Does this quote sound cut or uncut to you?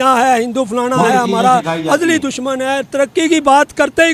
uncut